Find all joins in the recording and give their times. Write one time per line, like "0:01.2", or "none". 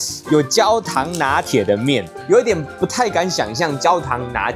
none